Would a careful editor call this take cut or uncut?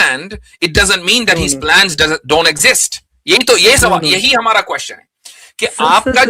uncut